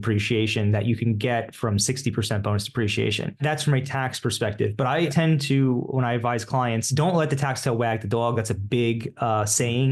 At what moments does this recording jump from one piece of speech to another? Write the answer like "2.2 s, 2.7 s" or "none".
3.4 s, 5.1 s, 6.9 s